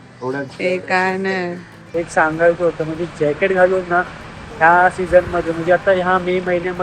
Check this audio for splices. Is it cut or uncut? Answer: cut